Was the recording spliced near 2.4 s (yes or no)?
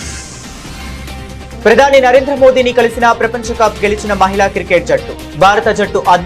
no